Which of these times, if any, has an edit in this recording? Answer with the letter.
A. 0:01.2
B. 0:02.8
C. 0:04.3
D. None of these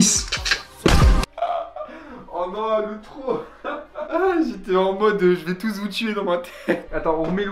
A